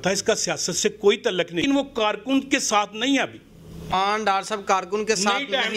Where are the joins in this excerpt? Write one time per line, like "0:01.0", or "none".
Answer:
0:01.6
0:03.9